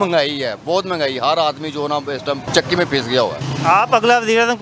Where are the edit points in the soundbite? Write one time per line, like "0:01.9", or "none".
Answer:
0:02.5